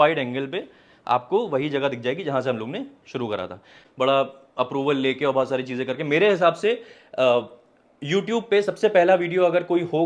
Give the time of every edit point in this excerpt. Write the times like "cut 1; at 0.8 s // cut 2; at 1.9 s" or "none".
cut 1; at 3.8 s